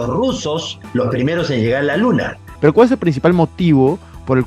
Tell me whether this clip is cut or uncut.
cut